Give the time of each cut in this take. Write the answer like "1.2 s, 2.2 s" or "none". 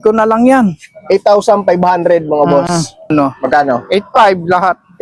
3.1 s

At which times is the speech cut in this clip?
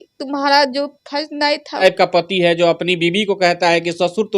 1.8 s

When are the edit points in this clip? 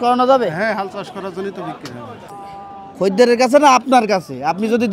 2.3 s

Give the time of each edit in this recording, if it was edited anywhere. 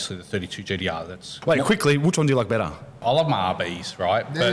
1.4 s, 3.0 s

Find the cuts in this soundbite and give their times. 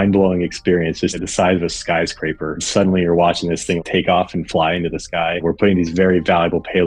1.2 s, 2.6 s, 3.8 s, 5.4 s

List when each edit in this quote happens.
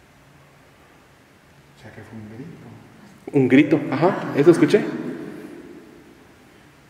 none

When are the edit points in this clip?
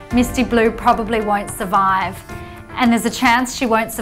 none

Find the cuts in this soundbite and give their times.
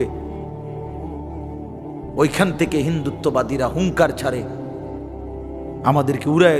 4.5 s, 5.8 s

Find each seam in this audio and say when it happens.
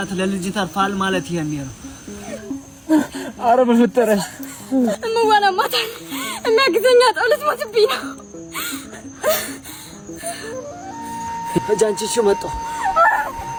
none

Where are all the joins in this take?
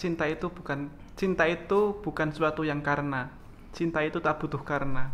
none

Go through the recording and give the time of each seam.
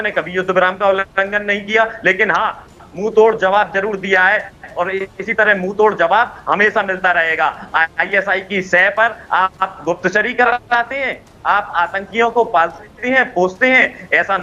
none

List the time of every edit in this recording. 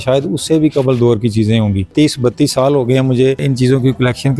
1.9 s, 3.4 s

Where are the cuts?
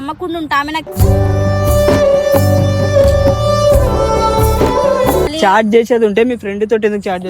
5.3 s

